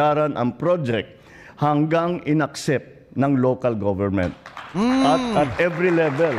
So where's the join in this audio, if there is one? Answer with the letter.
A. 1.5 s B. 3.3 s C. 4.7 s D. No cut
A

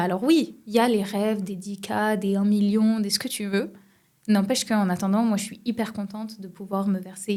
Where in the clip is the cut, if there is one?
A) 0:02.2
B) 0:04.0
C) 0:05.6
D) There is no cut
D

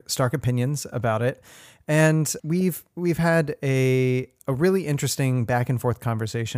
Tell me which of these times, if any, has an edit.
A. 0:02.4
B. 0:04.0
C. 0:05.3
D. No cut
A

